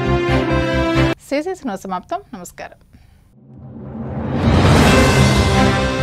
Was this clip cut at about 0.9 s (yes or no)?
no